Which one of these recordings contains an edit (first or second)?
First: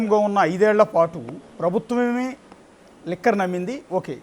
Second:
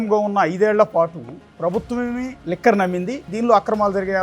second